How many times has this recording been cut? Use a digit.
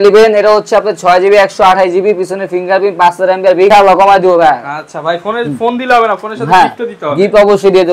1